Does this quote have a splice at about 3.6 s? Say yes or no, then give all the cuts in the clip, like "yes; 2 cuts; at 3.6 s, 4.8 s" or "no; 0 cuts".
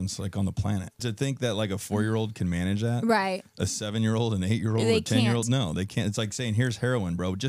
no; 1 cut; at 1.0 s